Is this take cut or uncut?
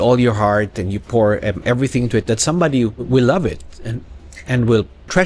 cut